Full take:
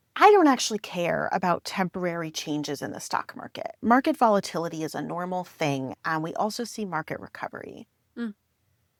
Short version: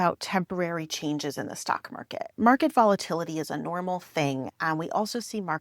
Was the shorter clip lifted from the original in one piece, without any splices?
yes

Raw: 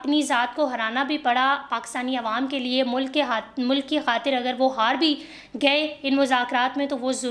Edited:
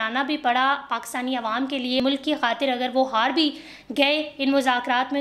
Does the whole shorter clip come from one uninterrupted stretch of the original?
no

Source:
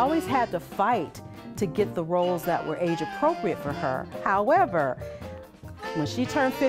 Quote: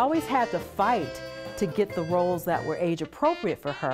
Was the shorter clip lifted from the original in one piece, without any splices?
yes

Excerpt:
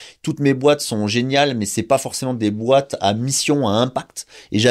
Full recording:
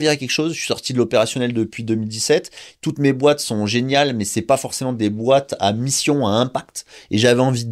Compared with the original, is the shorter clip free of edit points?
yes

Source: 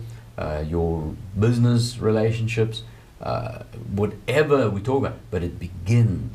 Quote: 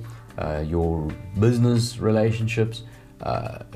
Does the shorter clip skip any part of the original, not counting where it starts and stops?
no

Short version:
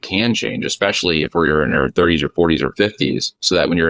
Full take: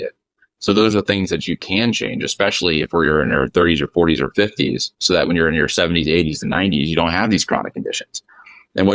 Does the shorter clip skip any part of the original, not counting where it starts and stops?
no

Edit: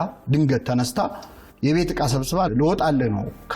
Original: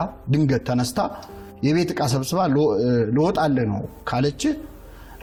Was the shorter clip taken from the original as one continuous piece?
no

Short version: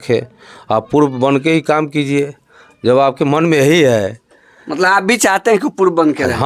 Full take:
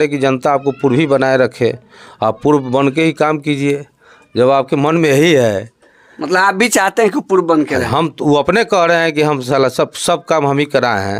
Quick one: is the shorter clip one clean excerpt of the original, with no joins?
yes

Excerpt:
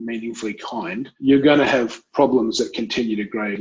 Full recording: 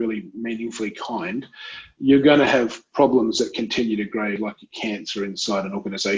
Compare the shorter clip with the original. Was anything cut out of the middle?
yes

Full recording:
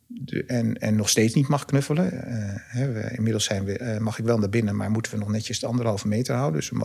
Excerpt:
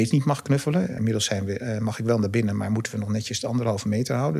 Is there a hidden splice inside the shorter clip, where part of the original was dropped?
yes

